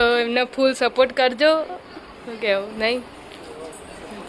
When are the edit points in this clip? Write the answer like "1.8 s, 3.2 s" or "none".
none